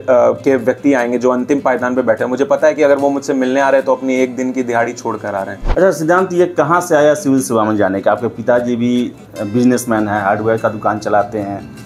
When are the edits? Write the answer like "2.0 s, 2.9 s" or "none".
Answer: 5.6 s